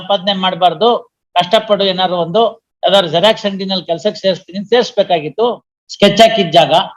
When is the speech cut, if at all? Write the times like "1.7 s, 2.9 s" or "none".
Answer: 5.4 s